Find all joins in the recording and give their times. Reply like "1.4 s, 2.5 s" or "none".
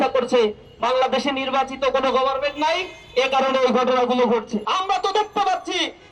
4.6 s